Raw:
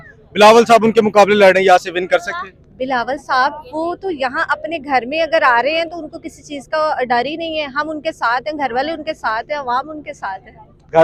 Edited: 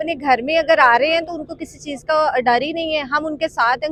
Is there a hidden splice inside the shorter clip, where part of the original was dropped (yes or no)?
no